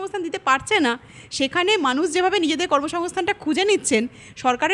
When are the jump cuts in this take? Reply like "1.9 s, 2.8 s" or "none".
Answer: none